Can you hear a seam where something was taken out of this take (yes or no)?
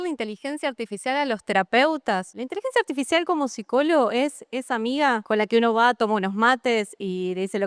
yes